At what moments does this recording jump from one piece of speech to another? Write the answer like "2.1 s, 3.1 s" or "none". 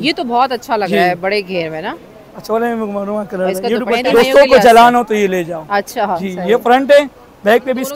4.0 s